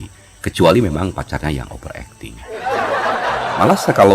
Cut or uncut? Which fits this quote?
uncut